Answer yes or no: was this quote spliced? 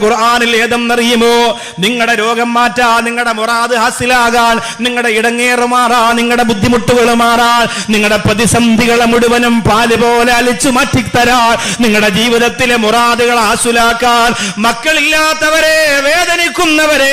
no